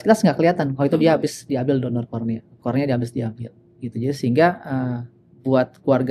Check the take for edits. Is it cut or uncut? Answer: uncut